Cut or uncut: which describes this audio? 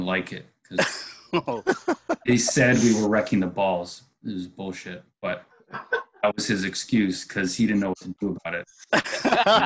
uncut